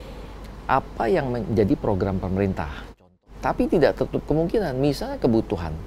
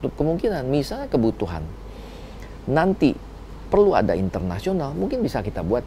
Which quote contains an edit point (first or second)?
first